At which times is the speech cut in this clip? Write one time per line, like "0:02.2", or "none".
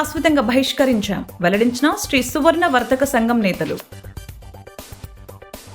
none